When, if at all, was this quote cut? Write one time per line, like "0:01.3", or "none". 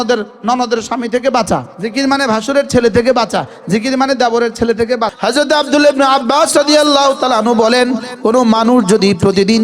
0:01.8
0:05.1